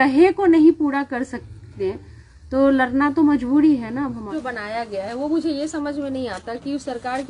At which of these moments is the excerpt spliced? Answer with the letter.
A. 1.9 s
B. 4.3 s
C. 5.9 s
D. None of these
B